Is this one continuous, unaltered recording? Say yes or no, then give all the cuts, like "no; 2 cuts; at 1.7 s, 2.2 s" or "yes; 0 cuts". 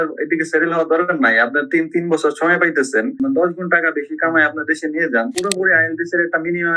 no; 2 cuts; at 3.1 s, 5.3 s